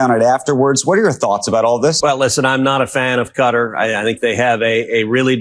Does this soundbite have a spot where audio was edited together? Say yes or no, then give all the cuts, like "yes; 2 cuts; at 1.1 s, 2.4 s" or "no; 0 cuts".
yes; 1 cut; at 2.0 s